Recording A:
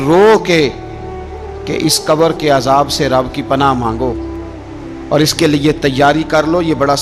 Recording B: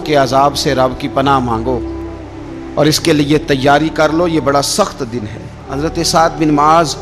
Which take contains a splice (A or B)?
B